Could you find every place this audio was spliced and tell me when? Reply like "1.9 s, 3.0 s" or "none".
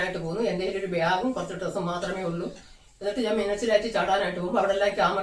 none